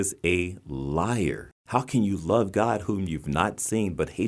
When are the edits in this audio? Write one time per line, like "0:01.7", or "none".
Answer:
0:01.5